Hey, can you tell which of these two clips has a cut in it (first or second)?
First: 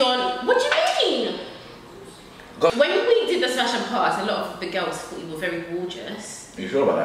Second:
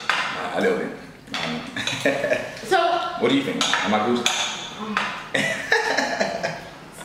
first